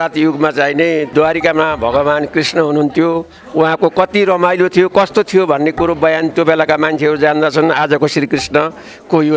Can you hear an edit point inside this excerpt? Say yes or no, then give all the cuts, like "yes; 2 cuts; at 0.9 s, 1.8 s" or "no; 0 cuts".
yes; 1 cut; at 1.1 s